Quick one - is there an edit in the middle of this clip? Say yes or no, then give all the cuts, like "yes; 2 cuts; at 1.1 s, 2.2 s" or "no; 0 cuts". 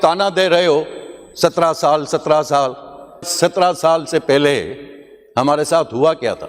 yes; 1 cut; at 3.3 s